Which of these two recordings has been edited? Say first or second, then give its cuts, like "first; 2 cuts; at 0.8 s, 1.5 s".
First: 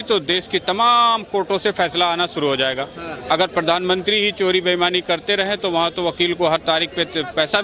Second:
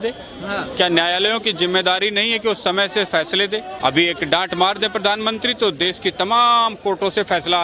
second; 1 cut; at 3.7 s